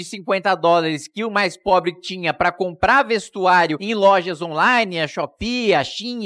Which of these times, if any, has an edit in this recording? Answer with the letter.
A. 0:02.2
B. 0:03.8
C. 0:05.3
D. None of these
B